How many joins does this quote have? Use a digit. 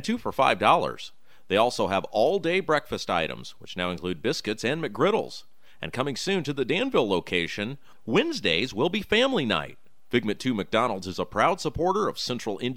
0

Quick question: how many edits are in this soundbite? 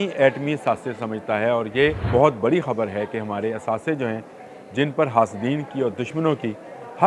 1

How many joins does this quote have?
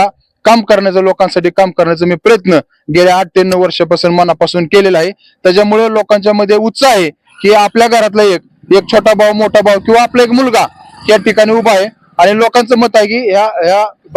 0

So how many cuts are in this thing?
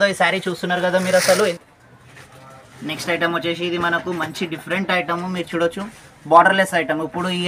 1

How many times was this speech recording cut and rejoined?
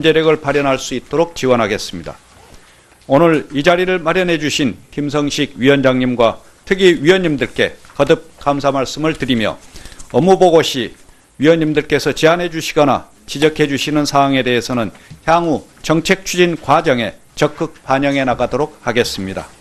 1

